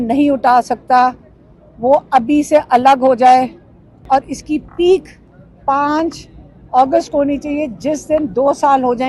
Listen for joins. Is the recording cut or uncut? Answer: cut